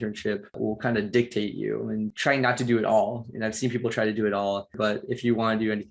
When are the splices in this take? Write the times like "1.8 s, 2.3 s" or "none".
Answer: 4.8 s